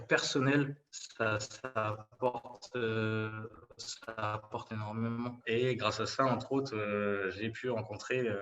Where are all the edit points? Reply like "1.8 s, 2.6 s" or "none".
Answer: 5.4 s